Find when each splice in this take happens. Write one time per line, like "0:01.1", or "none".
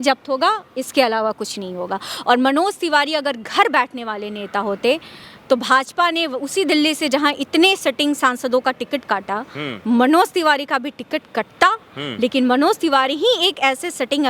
none